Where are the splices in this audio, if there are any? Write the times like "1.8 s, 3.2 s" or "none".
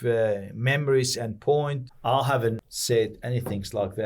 1.8 s, 2.6 s

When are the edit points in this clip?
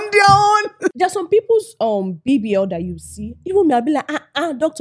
1.0 s

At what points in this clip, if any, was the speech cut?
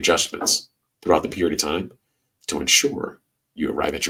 none

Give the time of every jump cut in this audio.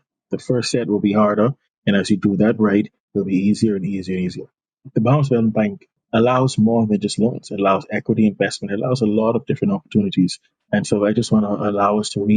4.7 s, 5.9 s

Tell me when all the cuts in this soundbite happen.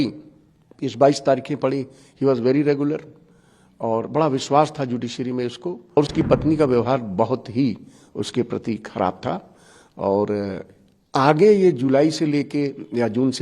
6.0 s

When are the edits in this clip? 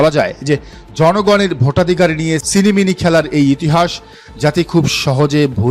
none

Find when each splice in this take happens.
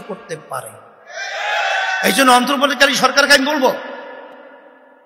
none

